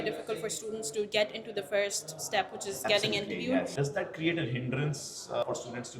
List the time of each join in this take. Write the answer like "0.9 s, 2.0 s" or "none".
3.8 s